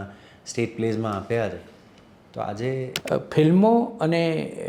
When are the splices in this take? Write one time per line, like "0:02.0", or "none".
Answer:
0:03.0